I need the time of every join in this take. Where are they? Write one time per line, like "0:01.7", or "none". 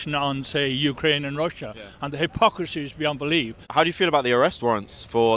0:03.6